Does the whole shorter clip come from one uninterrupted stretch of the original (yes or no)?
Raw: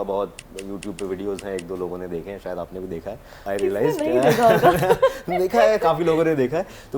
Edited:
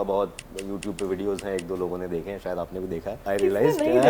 no